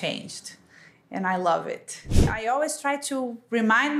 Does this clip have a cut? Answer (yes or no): yes